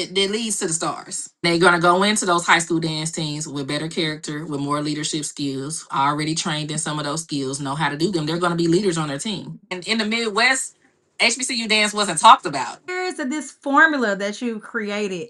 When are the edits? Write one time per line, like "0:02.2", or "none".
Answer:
0:01.4
0:09.7
0:12.8